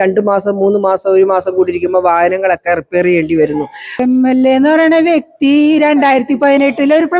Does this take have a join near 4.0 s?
yes; 1 cut; at 4.0 s

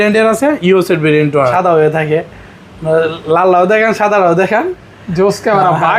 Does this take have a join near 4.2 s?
no; 1 cut; at 1.5 s

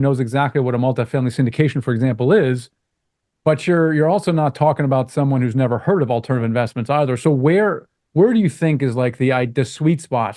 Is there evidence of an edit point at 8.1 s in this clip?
no; 0 cuts

